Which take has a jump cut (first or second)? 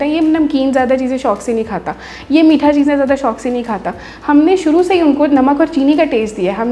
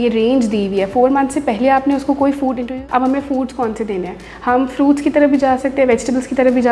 second